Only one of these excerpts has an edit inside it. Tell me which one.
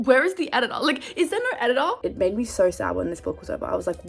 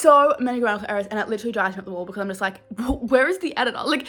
first; 1 cut; at 2.0 s

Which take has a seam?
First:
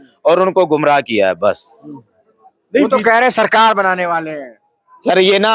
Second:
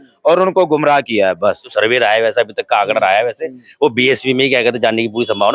second; 1 cut; at 1.6 s

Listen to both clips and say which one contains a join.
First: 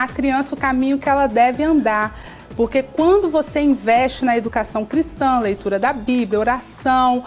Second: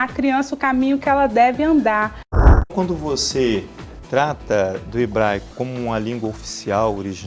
second; 1 cut; at 2.7 s

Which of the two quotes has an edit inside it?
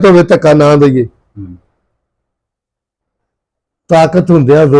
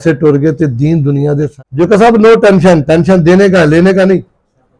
second; 1 cut; at 1.7 s

